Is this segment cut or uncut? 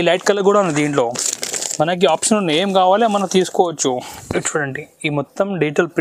cut